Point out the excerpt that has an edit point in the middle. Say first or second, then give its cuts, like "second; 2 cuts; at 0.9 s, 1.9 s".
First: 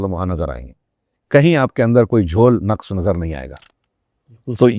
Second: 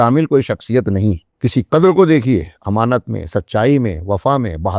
second; 1 cut; at 1.3 s